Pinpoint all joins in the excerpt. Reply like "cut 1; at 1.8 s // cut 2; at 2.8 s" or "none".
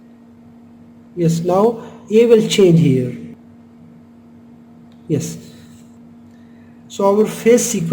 cut 1; at 3.3 s